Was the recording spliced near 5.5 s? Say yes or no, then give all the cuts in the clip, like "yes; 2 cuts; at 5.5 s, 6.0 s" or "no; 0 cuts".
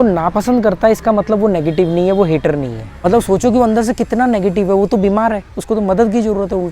no; 1 cut; at 2.8 s